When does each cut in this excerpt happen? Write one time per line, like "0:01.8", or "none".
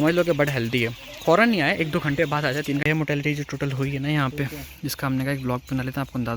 0:02.8